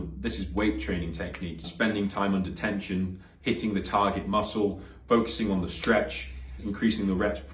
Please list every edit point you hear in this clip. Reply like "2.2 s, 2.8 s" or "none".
1.7 s, 6.6 s